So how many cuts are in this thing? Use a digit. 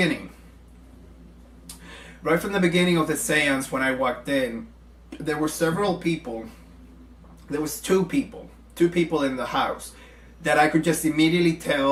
0